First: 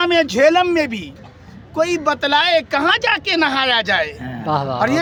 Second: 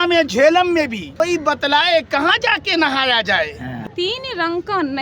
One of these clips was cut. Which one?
second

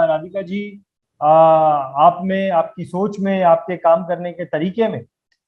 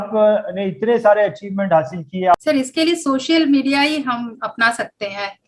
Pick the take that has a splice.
second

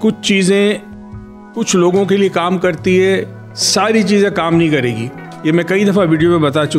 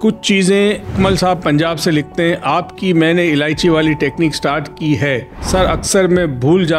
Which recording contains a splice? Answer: second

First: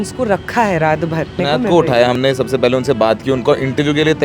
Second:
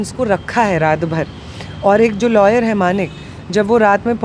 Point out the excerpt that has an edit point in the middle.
first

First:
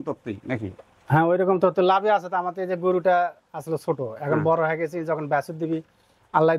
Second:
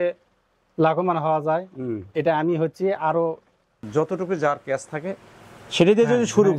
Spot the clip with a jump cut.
second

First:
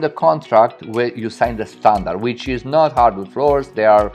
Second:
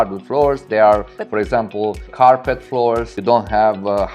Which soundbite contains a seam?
second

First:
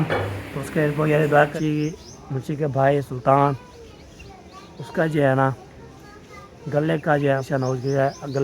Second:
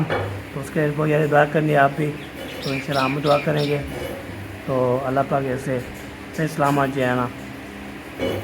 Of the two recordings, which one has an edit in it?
first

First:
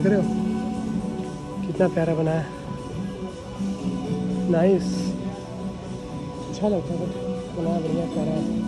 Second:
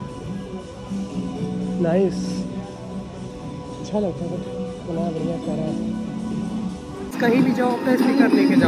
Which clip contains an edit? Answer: second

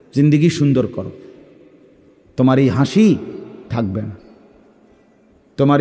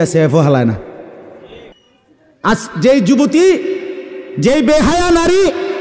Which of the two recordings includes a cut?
second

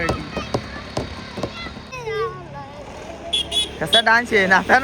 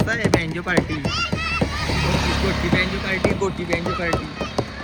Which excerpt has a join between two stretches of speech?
first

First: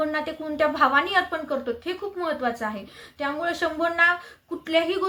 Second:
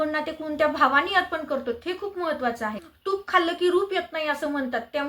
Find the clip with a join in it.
second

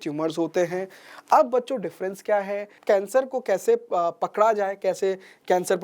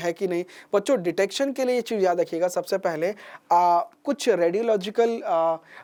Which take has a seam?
first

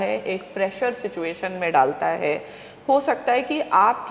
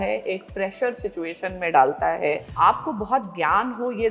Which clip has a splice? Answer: second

